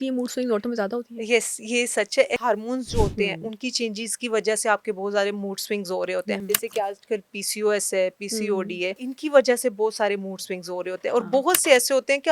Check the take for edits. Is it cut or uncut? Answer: cut